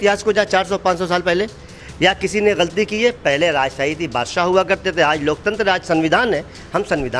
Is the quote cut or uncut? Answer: uncut